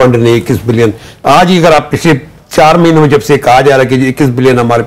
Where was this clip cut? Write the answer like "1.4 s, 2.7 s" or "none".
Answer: none